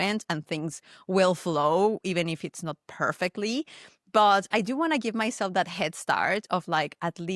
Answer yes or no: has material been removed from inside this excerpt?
no